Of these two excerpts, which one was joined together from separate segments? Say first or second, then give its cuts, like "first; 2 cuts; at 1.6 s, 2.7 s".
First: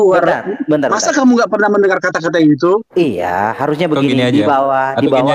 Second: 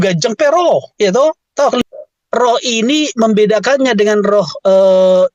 second; 1 cut; at 1.8 s